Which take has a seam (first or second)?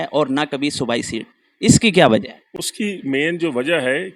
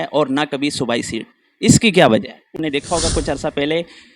second